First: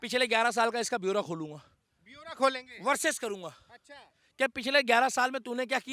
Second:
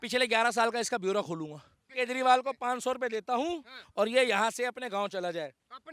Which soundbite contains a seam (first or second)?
second